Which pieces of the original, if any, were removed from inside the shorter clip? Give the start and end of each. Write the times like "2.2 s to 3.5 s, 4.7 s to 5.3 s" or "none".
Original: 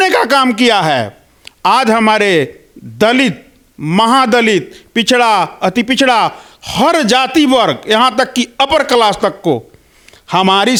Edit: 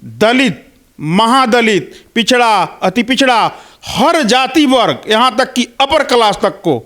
none